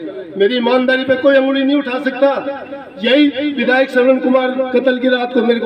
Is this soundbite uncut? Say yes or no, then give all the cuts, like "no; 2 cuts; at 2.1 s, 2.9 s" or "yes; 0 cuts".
yes; 0 cuts